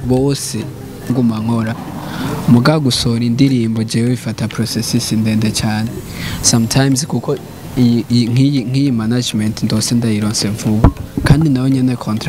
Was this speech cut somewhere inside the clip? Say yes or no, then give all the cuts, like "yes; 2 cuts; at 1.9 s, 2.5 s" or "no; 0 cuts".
yes; 1 cut; at 1.1 s